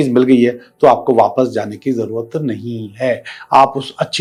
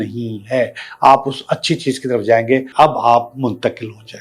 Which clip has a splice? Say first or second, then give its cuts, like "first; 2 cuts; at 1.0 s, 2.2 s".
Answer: second; 1 cut; at 2.7 s